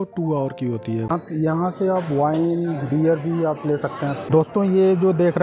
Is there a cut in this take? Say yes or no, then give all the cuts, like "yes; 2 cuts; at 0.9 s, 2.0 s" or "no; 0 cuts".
yes; 2 cuts; at 1.1 s, 4.2 s